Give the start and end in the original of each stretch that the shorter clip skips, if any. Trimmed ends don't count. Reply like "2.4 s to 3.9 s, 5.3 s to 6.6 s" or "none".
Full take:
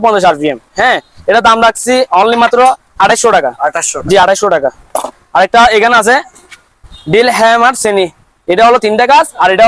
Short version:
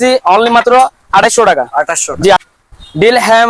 4.2 s to 6.5 s